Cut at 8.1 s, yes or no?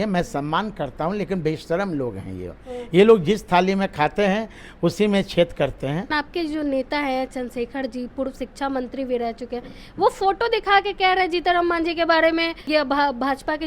no